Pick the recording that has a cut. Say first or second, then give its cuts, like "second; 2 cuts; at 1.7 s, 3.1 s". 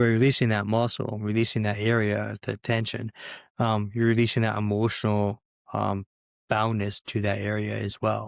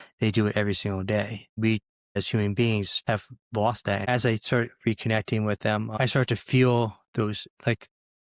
second; 4 cuts; at 1.6 s, 2.9 s, 4.1 s, 5.9 s